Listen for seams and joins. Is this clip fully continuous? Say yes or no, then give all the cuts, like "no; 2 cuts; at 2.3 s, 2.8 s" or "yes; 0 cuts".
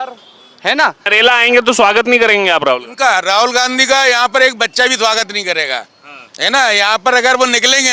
no; 1 cut; at 1.0 s